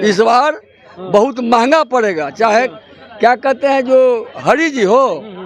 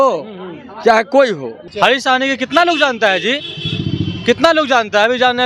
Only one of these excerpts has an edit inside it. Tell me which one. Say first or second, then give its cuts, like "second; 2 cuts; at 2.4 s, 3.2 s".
second; 1 cut; at 1.6 s